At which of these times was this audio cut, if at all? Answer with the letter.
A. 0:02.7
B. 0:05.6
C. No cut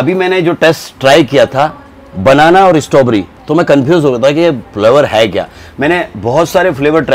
C